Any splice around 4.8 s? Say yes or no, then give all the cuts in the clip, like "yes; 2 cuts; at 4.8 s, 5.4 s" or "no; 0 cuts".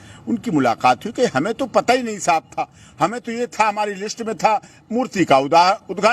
no; 1 cut; at 2.4 s